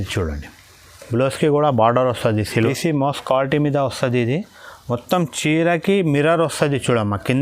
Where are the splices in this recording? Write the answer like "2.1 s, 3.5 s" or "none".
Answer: 2.5 s